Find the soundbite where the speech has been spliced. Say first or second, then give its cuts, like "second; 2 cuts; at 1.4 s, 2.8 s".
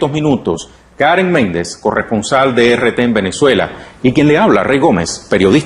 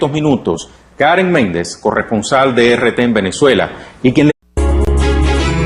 first; 1 cut; at 4.3 s